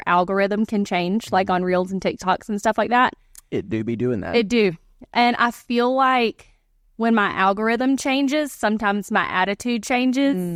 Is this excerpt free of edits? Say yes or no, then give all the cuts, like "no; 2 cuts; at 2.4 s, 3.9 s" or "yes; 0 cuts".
yes; 0 cuts